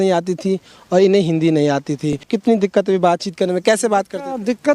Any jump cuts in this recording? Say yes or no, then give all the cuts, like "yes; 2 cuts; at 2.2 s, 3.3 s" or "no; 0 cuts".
yes; 1 cut; at 2.3 s